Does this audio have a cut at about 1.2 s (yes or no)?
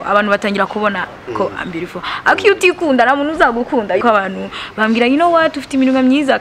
no